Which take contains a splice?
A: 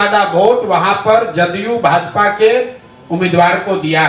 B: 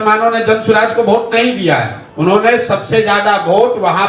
B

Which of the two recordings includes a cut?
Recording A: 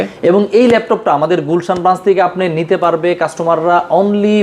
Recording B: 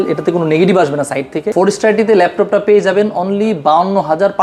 B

